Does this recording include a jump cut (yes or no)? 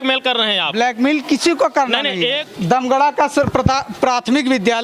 yes